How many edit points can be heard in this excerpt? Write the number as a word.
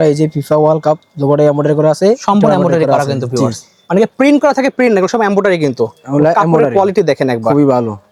zero